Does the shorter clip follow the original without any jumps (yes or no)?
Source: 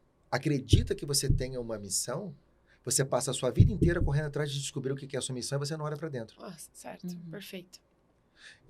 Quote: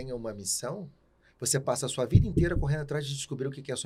yes